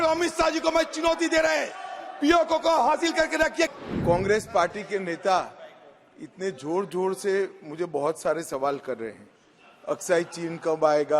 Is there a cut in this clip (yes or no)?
yes